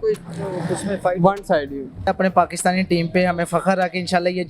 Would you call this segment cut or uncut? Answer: cut